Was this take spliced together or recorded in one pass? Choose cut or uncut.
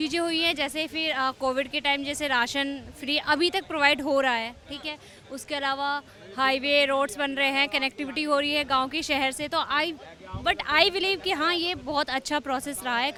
uncut